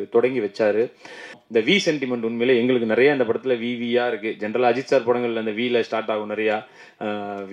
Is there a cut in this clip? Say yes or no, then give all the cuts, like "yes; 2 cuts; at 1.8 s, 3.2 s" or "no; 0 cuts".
yes; 1 cut; at 1.4 s